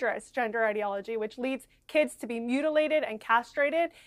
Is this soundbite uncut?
yes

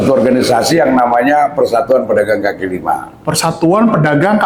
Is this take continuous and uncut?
yes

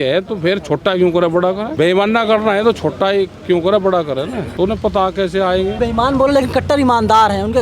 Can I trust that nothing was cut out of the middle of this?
no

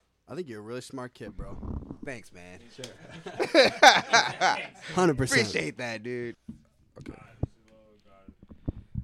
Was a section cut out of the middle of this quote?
yes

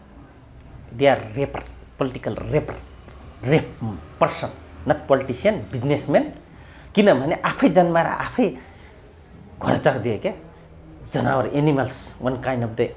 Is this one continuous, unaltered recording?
yes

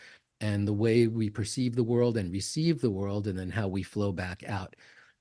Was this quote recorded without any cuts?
yes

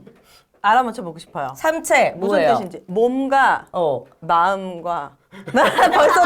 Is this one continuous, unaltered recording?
yes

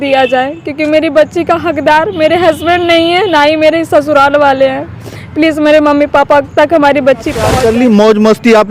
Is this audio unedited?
no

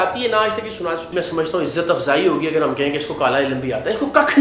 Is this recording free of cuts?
no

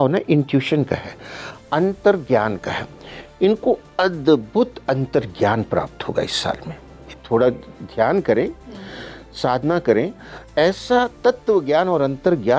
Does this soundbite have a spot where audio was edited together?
no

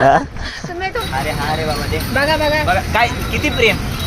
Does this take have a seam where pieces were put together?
yes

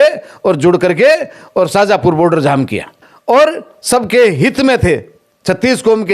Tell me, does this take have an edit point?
yes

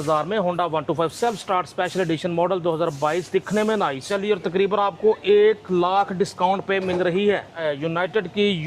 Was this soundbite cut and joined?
yes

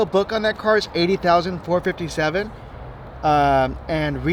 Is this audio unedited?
yes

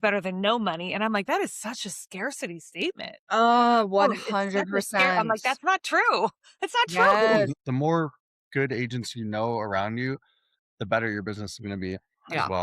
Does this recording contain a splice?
yes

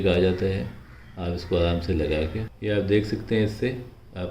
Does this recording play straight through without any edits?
no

